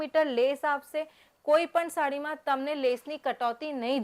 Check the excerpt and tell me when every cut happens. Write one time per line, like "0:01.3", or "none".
none